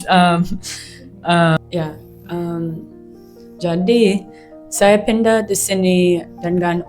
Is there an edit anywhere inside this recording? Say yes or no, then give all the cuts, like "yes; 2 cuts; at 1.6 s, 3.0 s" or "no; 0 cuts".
yes; 1 cut; at 1.6 s